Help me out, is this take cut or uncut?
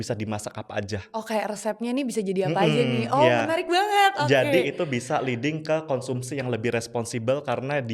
uncut